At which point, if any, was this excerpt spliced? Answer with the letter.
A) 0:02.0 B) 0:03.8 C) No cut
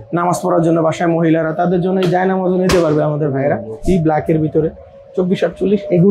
B